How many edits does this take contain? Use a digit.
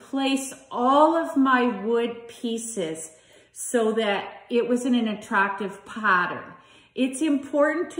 1